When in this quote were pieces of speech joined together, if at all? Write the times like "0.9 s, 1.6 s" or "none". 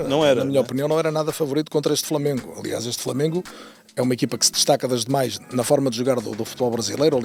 none